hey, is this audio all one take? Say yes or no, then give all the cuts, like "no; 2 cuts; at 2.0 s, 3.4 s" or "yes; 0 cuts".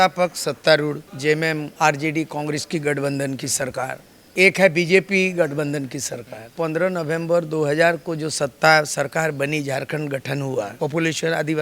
no; 2 cuts; at 6.5 s, 10.7 s